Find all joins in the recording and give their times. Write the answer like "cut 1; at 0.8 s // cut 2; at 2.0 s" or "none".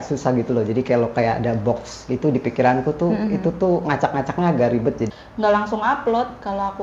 cut 1; at 5.1 s